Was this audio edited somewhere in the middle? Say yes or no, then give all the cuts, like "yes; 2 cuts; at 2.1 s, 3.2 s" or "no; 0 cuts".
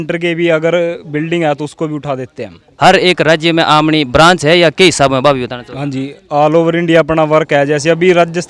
no; 0 cuts